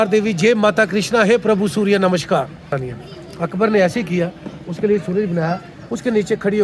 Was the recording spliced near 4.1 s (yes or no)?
no